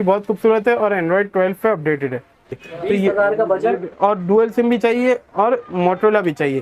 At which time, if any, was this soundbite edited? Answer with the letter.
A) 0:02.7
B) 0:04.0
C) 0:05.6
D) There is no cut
A